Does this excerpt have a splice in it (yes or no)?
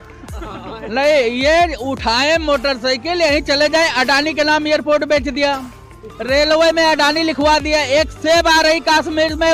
no